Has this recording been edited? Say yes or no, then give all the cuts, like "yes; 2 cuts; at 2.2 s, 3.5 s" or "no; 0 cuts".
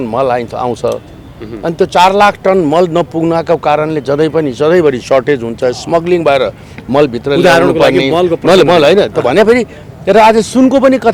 no; 0 cuts